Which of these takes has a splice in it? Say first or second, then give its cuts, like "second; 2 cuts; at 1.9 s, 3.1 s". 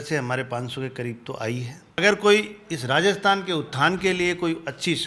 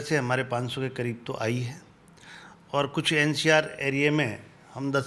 first; 1 cut; at 2.0 s